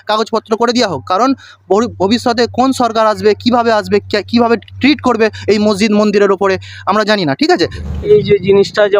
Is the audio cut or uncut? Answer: cut